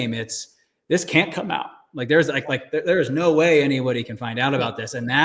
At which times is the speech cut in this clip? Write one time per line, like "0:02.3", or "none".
none